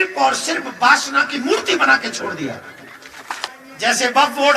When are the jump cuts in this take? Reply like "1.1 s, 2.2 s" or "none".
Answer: 3.5 s